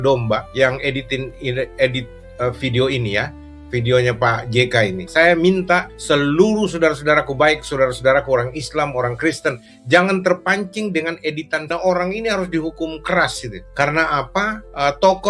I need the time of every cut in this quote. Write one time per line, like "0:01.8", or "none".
0:11.6